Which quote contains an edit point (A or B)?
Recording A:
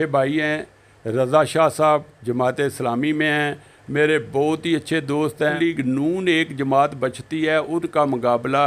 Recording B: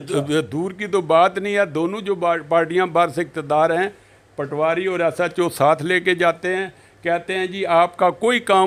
A